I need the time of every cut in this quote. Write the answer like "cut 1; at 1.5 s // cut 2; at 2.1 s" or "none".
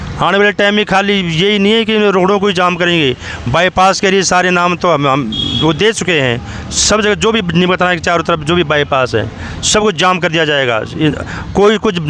none